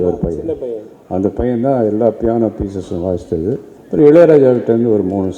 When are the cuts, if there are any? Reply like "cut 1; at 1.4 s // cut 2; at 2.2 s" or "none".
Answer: cut 1; at 3.7 s